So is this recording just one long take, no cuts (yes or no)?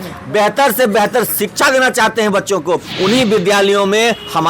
no